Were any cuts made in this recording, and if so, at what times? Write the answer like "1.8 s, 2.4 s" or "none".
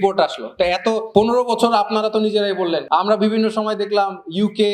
1.0 s, 2.8 s